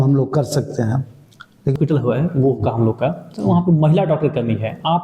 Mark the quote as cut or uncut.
cut